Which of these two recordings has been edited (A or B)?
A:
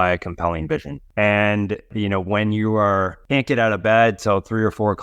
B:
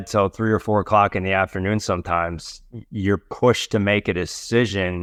A